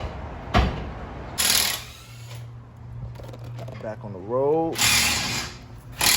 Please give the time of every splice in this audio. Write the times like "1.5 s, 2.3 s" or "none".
1.4 s